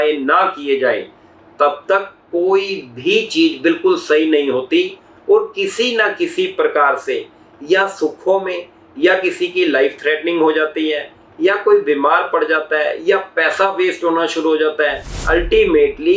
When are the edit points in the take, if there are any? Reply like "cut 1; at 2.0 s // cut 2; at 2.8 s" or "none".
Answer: cut 1; at 15.1 s